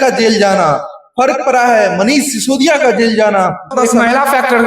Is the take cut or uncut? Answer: cut